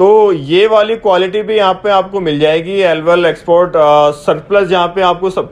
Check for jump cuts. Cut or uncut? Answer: uncut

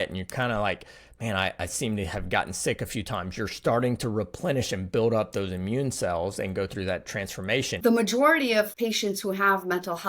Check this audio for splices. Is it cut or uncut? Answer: cut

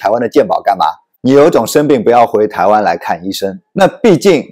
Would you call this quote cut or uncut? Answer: cut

